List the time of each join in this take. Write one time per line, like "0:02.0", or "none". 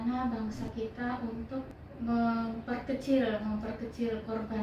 0:01.7